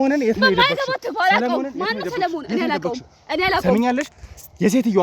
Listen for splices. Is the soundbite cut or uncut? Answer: uncut